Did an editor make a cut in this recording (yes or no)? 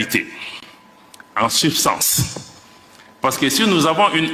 no